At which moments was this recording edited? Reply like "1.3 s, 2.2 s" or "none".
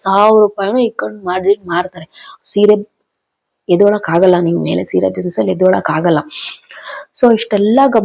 2.3 s